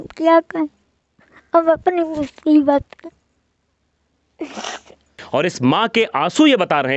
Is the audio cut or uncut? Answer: cut